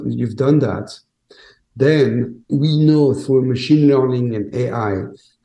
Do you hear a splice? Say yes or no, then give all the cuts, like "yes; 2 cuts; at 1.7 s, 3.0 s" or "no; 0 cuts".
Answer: yes; 1 cut; at 2.5 s